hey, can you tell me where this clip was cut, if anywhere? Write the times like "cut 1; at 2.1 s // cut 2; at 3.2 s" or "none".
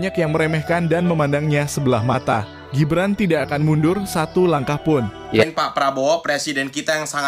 cut 1; at 5.1 s